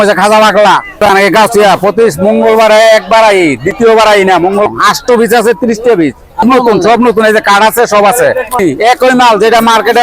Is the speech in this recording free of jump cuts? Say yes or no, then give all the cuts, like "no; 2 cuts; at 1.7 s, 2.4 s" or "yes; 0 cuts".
no; 4 cuts; at 1.0 s, 4.7 s, 6.4 s, 8.6 s